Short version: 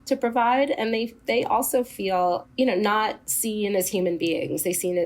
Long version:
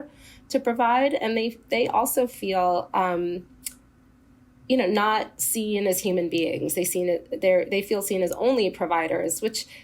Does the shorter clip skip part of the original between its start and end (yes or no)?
yes